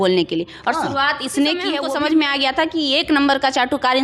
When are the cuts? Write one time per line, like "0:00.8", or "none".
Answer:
0:01.8